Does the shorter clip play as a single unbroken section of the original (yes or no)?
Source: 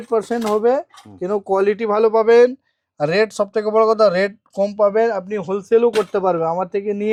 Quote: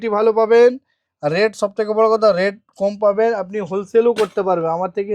yes